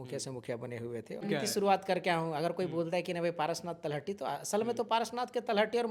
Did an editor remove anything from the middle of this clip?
yes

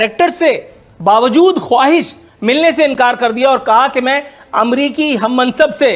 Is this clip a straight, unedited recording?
yes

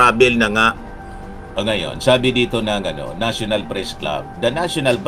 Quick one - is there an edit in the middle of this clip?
yes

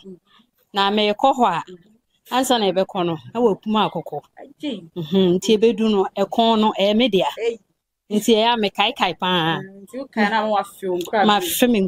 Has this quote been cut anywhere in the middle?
no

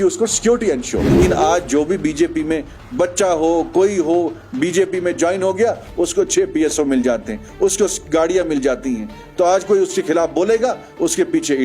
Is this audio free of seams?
no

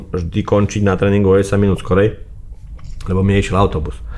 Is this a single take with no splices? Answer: yes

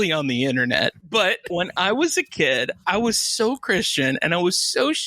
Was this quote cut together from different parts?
yes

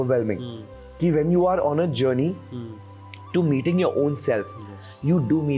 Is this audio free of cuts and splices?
yes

